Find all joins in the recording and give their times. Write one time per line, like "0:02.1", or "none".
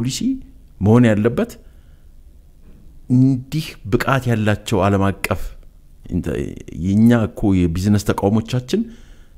none